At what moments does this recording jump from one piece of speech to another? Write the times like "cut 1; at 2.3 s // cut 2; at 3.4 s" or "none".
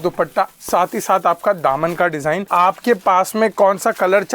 cut 1; at 2.5 s